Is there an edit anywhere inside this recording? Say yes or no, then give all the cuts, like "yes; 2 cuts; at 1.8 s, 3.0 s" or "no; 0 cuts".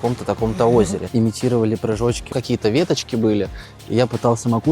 yes; 2 cuts; at 1.0 s, 2.3 s